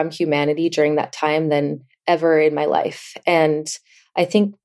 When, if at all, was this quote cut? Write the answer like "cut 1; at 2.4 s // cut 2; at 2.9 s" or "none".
none